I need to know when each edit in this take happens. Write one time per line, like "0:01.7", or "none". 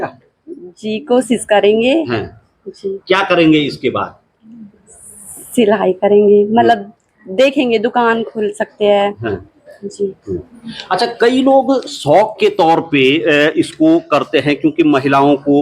none